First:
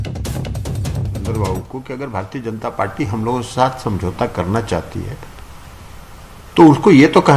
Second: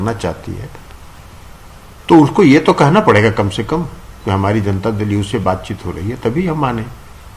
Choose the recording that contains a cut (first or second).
first